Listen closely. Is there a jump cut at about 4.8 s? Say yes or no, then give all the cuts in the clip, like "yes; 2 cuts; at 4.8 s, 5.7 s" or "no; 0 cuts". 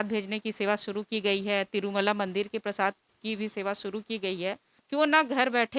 yes; 1 cut; at 4.8 s